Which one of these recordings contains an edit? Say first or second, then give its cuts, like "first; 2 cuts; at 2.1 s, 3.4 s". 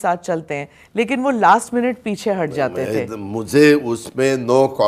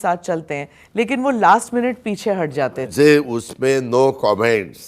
second; 1 cut; at 2.8 s